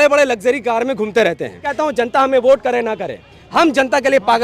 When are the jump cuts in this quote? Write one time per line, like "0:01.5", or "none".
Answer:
0:01.7